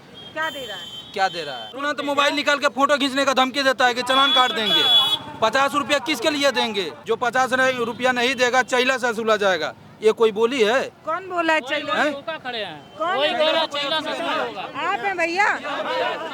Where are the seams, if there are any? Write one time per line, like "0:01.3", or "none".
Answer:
0:01.8
0:07.0